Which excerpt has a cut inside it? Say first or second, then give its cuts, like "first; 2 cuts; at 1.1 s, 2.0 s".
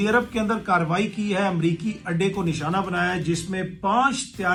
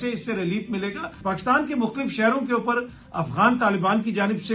second; 1 cut; at 1.1 s